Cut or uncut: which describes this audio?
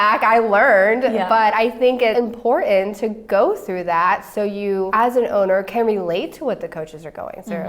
cut